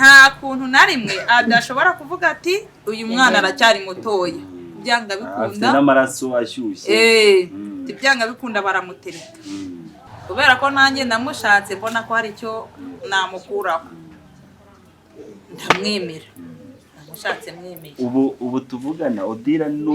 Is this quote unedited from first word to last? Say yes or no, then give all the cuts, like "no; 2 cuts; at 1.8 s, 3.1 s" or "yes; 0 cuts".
no; 1 cut; at 10.1 s